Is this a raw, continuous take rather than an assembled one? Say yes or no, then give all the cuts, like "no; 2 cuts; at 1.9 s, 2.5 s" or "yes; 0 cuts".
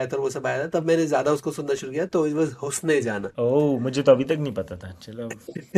no; 1 cut; at 3.3 s